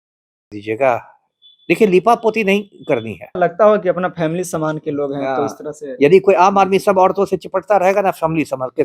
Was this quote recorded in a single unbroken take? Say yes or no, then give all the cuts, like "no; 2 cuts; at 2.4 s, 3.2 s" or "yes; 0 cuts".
no; 1 cut; at 3.4 s